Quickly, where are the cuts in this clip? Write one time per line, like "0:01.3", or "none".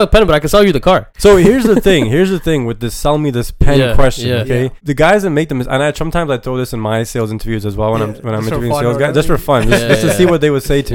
0:01.1
0:04.8